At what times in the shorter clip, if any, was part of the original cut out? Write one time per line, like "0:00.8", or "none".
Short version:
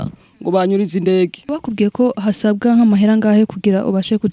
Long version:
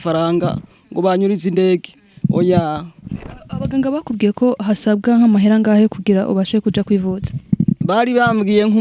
0:01.6